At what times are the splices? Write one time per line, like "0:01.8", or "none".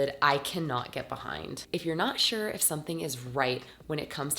0:01.6